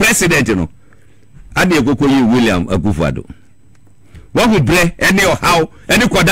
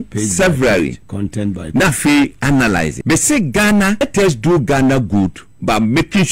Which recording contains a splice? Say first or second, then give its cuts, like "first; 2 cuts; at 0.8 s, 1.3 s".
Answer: second; 2 cuts; at 3.0 s, 4.0 s